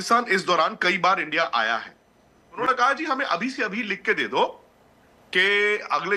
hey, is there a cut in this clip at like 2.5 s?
yes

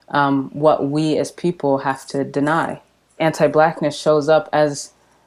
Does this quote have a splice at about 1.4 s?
no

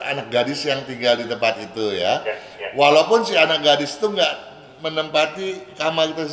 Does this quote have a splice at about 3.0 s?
no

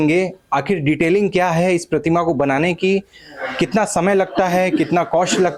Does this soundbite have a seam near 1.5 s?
no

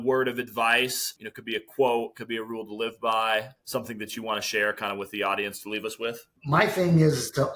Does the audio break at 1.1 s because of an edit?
yes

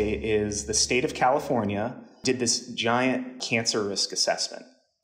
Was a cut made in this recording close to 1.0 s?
no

